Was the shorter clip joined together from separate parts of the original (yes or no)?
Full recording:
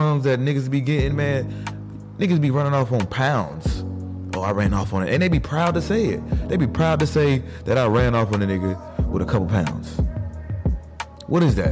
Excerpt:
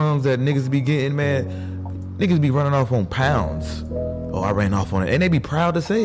no